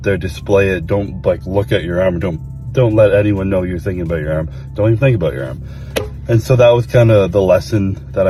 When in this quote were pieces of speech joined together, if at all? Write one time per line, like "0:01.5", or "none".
none